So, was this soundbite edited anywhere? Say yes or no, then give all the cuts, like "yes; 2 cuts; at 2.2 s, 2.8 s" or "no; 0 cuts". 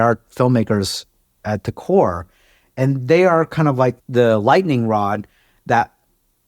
yes; 1 cut; at 4.0 s